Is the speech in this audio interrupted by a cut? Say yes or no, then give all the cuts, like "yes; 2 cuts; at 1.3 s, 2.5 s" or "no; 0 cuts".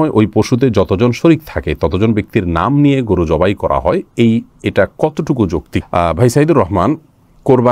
no; 0 cuts